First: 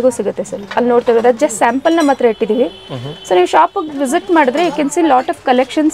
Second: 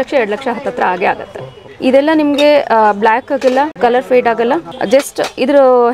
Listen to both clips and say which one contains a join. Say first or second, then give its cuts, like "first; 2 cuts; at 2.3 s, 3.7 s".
second; 3 cuts; at 1.6 s, 3.7 s, 4.7 s